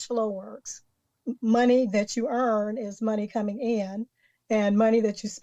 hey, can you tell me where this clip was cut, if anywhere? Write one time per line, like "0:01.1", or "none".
0:01.1

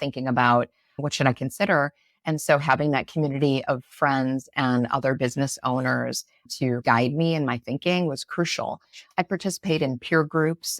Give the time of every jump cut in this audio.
none

